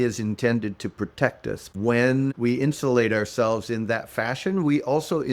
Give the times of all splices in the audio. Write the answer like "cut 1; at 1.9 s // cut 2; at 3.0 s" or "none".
cut 1; at 1.7 s